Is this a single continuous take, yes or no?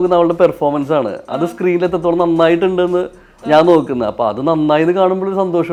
yes